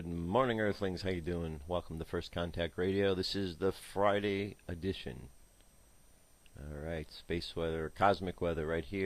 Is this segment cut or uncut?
cut